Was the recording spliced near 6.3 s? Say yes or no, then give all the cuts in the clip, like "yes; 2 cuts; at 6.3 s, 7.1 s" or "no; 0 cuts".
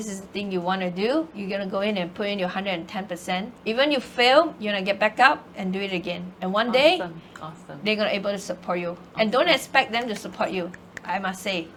no; 0 cuts